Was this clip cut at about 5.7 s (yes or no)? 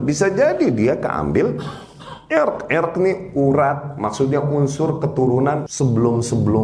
yes